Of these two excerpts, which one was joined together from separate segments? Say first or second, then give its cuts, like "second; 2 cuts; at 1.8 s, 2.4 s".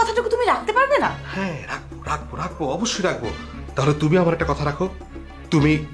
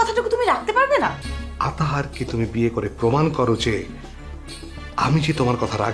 second; 1 cut; at 1.2 s